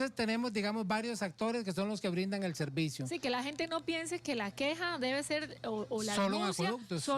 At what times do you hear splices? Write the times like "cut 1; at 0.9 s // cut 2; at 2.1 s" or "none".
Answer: none